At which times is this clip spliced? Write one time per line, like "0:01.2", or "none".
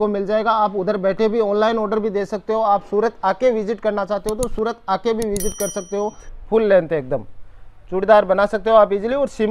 0:06.3